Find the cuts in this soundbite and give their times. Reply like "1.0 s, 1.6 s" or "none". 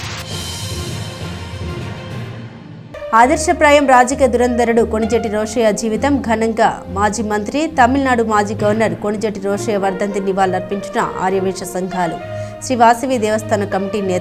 2.4 s